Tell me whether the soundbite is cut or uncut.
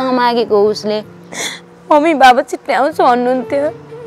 cut